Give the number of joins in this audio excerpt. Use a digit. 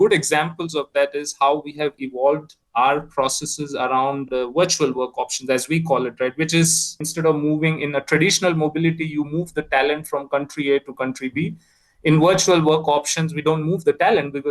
1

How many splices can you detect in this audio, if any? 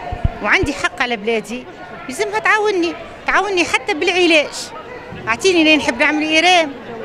0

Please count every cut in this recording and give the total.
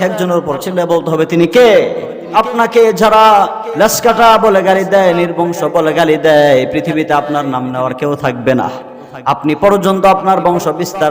1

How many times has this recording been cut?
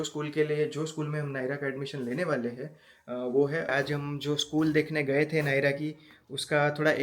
1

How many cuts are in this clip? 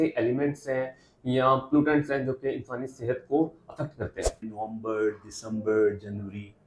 1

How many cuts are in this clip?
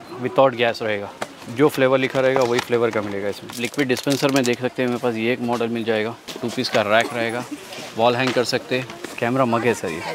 4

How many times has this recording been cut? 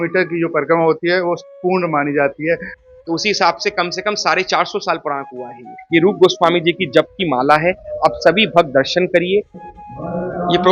3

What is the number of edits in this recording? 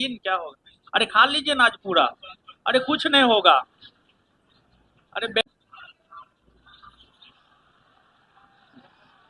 1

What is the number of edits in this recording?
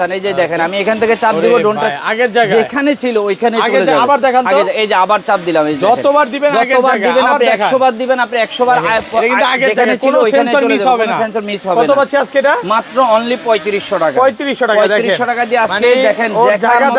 0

